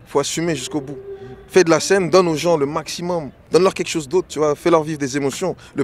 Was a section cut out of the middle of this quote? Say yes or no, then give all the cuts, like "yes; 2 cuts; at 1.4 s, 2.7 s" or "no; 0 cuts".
yes; 1 cut; at 3.3 s